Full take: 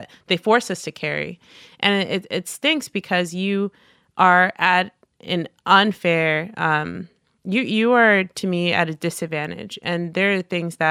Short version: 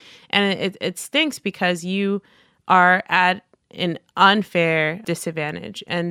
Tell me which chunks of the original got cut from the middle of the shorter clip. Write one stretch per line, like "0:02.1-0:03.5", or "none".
0:06.5-0:09.0